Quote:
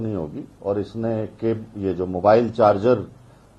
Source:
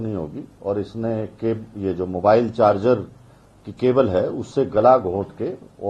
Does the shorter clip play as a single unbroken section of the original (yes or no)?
yes